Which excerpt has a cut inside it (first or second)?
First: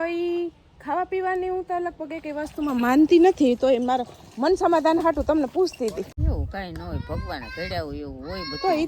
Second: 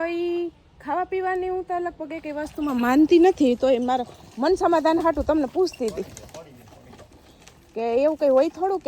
first